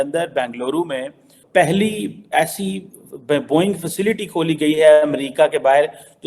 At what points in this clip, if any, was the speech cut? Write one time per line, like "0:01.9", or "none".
none